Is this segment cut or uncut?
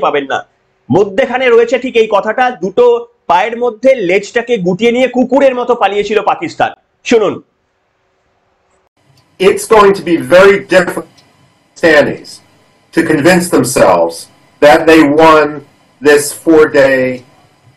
uncut